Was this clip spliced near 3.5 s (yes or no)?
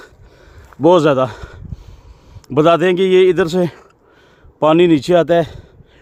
no